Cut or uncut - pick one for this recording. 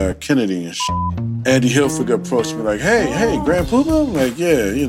cut